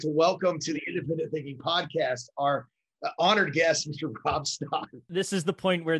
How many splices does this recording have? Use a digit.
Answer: 1